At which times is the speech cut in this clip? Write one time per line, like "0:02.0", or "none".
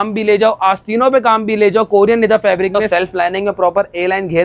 0:02.8